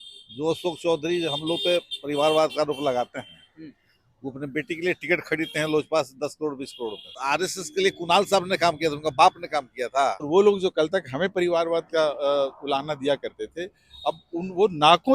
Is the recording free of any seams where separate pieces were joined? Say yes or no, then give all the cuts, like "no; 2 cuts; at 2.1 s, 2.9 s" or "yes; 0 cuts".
no; 2 cuts; at 7.2 s, 10.3 s